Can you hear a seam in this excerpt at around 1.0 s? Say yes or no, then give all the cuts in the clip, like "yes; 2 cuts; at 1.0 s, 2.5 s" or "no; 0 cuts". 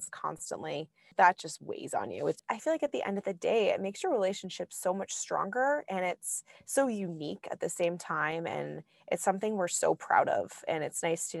yes; 2 cuts; at 1.0 s, 2.4 s